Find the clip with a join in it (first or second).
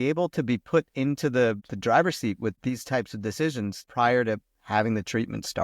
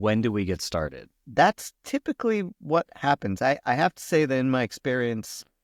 first